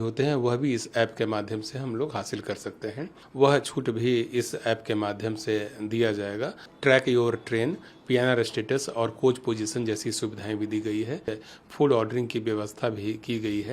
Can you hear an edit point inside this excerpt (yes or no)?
yes